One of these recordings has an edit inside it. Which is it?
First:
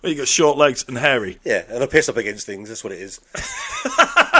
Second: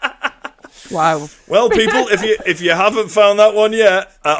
first; 1 cut; at 1.3 s

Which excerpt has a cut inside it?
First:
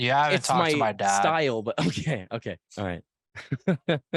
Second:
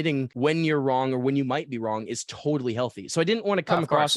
first; 1 cut; at 2.7 s

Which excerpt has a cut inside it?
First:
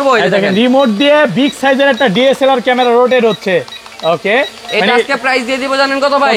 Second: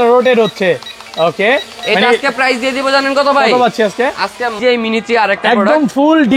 second; 1 cut; at 4.6 s

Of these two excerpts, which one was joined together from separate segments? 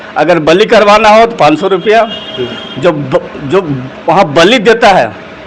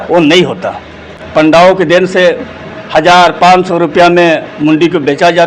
second; 1 cut; at 1.1 s

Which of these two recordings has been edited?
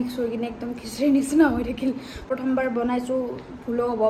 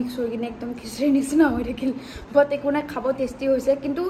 first; 1 cut; at 2.3 s

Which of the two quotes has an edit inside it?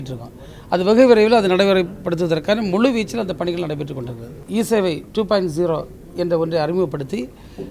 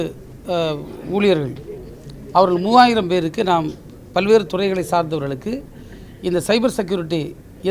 first; 1 cut; at 4.4 s

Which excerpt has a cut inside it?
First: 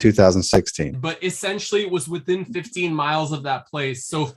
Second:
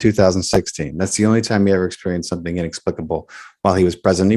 first; 1 cut; at 0.9 s

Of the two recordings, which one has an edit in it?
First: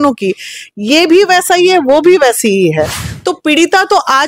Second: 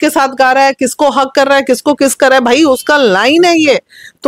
first; 1 cut; at 3.0 s

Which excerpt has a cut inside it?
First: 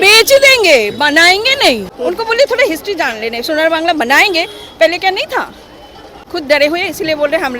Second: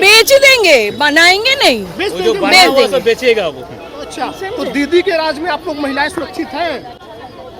first; 2 cuts; at 1.9 s, 6.1 s

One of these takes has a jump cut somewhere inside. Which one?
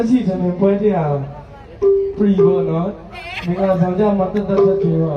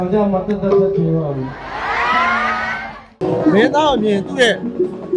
second; 1 cut; at 3.2 s

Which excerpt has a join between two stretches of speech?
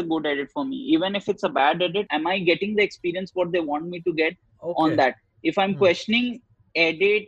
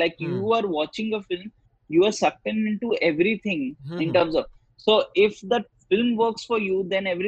first; 1 cut; at 2.1 s

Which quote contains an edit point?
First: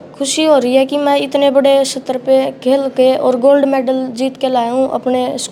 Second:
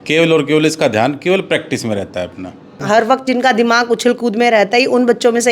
second; 1 cut; at 2.8 s

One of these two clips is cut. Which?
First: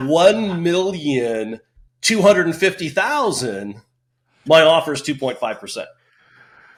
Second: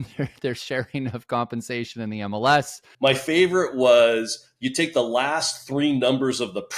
second; 1 cut; at 2.7 s

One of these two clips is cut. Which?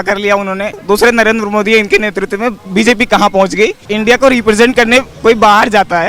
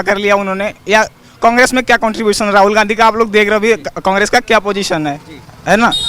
first; 2 cuts; at 0.8 s, 3.8 s

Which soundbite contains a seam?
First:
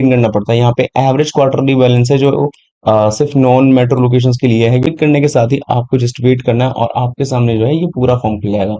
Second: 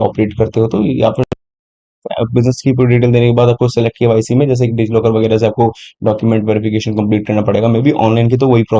first; 1 cut; at 4.9 s

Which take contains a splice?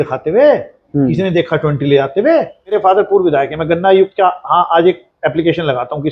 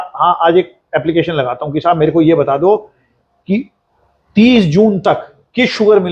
first; 1 cut; at 2.7 s

